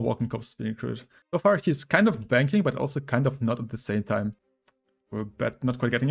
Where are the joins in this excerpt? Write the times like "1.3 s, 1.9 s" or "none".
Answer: 1.1 s, 4.4 s